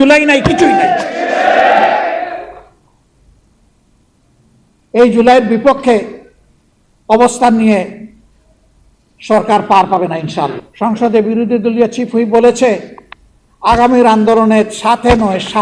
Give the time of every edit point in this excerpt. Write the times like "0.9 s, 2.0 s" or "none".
10.6 s